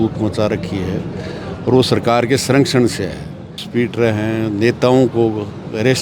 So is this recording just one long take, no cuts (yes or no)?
no